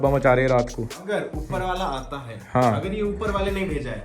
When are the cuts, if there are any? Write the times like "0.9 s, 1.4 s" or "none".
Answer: 0.9 s